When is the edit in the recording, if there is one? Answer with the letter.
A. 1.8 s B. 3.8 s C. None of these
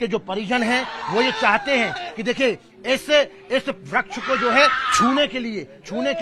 C